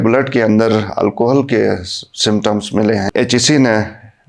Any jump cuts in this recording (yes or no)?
yes